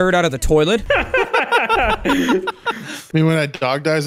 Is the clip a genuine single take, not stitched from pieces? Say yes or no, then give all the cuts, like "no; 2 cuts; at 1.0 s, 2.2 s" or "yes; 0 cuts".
no; 1 cut; at 2.9 s